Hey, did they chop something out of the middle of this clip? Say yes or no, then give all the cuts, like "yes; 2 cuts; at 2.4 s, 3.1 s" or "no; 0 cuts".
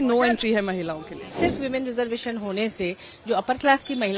yes; 1 cut; at 1.3 s